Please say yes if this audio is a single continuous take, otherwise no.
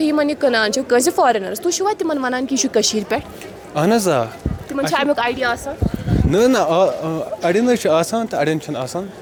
yes